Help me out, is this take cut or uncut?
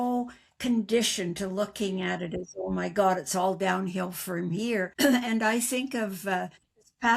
cut